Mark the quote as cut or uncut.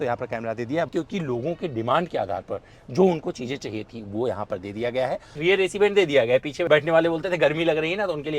cut